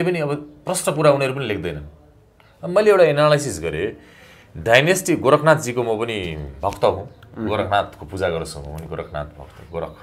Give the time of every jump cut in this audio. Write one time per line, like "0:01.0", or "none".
none